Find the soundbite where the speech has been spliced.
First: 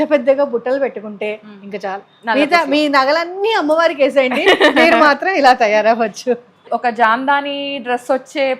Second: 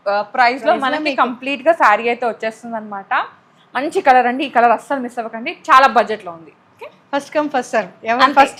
first; 1 cut; at 6.6 s

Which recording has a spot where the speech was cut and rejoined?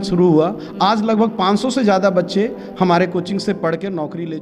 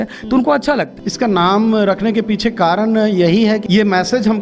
second; 2 cuts; at 1.0 s, 3.6 s

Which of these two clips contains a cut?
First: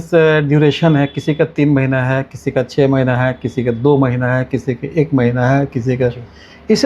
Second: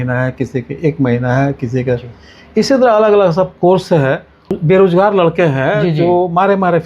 second; 1 cut; at 4.5 s

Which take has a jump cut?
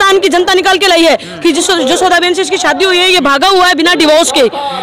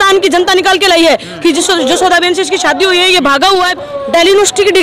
second; 1 cut; at 3.7 s

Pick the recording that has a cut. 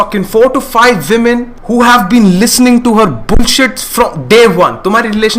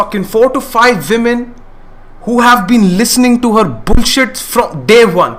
first; 1 cut; at 1.5 s

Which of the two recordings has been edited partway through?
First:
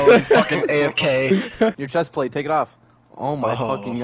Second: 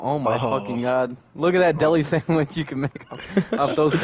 first; 1 cut; at 1.8 s

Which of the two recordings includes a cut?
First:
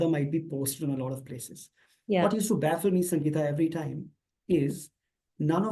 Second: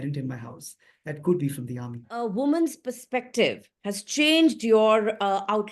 second; 1 cut; at 2.1 s

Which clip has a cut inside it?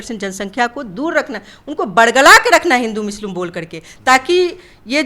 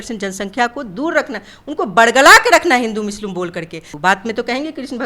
second; 1 cut; at 3.8 s

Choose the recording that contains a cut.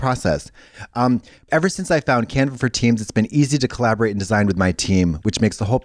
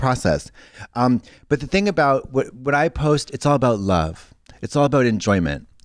first; 1 cut; at 1.3 s

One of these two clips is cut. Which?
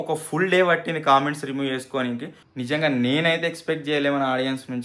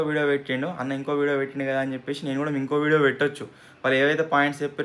first; 1 cut; at 2.4 s

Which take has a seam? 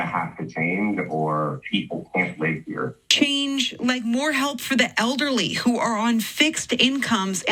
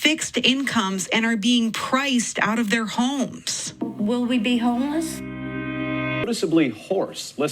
second; 1 cut; at 6.3 s

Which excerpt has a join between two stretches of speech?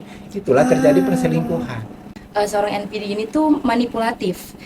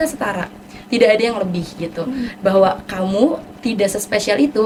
first; 1 cut; at 2.1 s

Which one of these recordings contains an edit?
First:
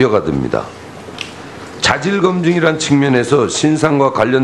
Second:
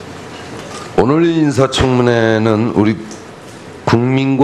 second; 1 cut; at 3.1 s

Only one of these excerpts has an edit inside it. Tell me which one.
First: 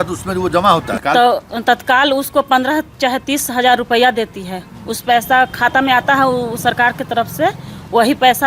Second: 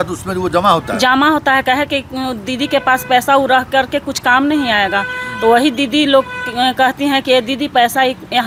first; 1 cut; at 0.9 s

